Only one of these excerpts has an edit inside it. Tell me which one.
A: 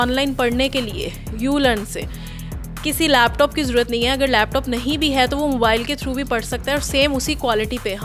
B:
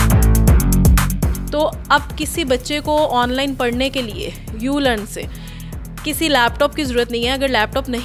B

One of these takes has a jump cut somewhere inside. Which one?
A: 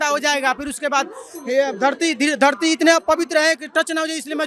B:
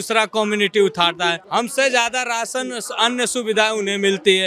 B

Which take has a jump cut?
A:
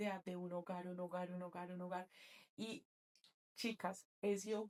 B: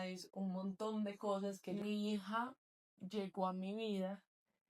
B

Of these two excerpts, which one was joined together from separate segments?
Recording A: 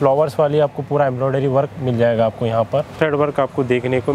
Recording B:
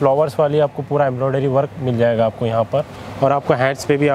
A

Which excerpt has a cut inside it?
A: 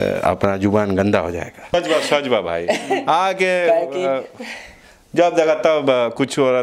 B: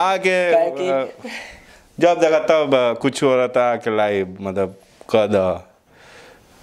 A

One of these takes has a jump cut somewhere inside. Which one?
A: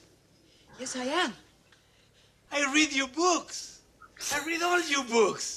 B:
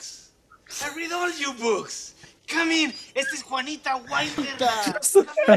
B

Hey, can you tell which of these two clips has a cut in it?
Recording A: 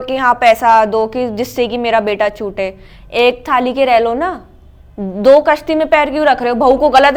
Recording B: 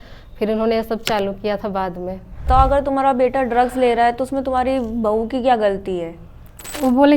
B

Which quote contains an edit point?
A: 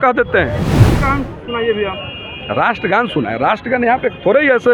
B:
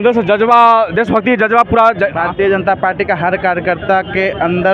A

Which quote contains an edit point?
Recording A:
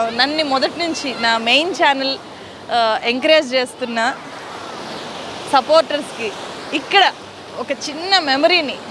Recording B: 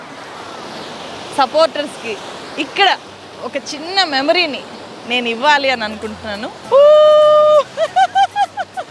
B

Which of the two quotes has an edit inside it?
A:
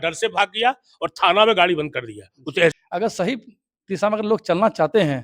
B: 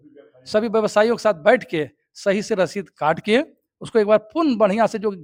A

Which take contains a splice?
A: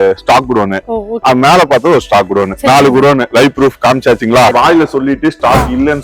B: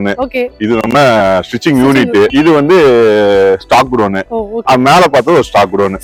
A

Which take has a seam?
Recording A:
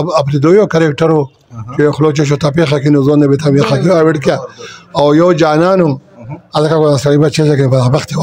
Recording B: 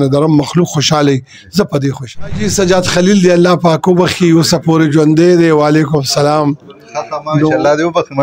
B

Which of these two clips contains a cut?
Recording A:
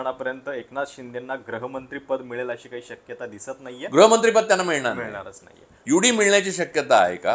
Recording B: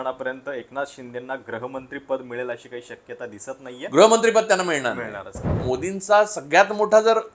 B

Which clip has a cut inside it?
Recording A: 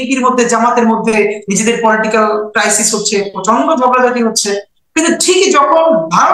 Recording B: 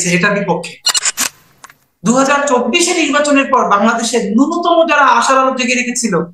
B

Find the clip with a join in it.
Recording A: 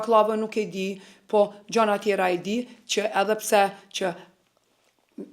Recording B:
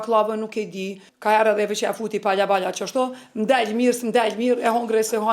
B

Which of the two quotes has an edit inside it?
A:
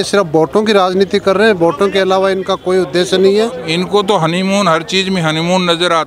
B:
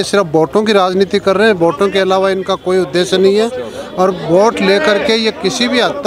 A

